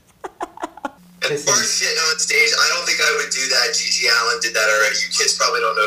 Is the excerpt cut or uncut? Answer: cut